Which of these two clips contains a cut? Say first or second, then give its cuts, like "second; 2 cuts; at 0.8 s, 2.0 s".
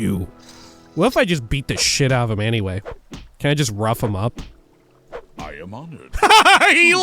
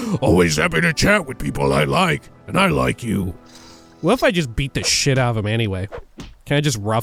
first; 1 cut; at 6.1 s